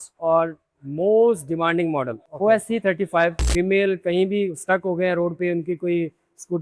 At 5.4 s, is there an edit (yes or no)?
no